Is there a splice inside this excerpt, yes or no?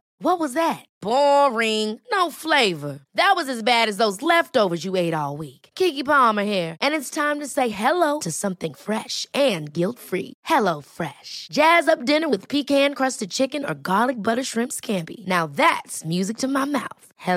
no